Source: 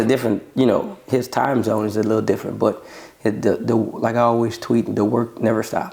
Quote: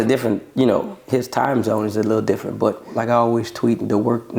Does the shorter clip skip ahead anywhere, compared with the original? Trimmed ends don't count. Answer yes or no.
yes